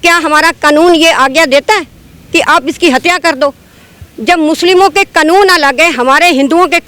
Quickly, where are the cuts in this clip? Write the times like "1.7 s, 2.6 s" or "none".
none